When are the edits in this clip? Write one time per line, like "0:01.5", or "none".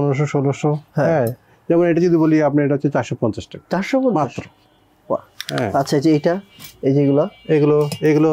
none